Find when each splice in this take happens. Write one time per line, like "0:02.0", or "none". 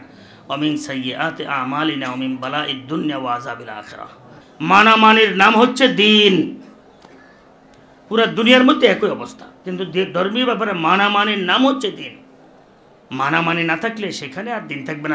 0:04.4